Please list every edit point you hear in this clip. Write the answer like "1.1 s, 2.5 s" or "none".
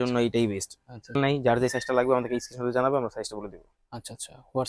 1.1 s